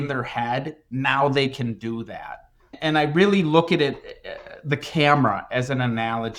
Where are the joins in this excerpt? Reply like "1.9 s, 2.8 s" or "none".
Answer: none